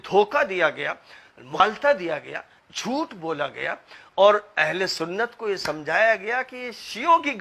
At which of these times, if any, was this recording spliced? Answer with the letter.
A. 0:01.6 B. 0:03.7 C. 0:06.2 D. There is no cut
A